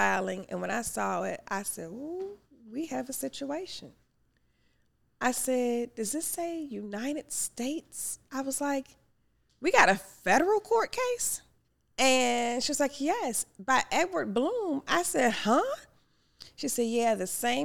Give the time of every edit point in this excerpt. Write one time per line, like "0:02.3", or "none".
none